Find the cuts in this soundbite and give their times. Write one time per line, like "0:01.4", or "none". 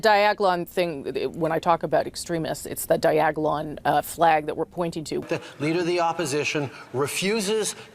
0:05.1